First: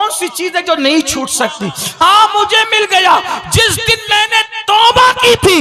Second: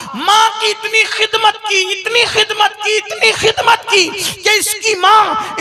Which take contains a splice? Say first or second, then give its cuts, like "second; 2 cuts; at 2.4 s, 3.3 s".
first; 1 cut; at 2.0 s